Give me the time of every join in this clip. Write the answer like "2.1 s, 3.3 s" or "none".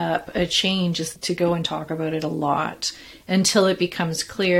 1.2 s